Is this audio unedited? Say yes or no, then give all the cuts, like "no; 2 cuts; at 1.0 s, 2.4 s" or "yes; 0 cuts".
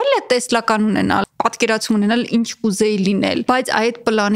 no; 2 cuts; at 1.3 s, 3.4 s